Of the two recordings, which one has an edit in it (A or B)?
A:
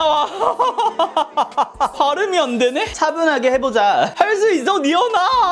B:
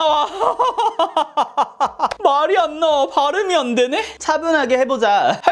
A